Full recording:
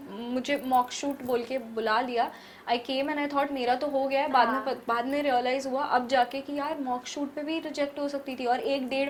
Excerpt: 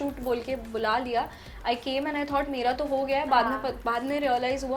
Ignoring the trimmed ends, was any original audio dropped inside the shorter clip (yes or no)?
no